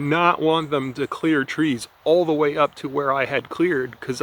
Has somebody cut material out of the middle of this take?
no; 0 cuts

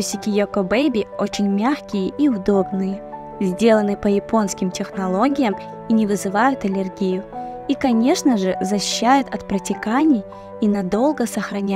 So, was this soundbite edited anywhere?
no; 0 cuts

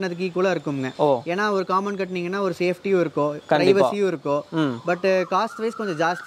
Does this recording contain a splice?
no; 0 cuts

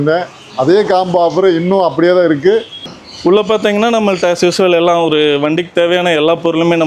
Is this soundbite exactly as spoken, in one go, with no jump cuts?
no; 1 cut; at 2.9 s

